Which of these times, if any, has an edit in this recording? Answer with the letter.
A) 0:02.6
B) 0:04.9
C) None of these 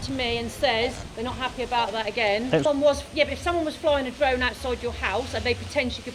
A